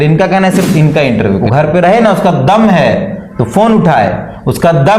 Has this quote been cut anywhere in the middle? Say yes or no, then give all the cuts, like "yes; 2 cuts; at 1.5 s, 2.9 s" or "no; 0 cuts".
yes; 1 cut; at 1.4 s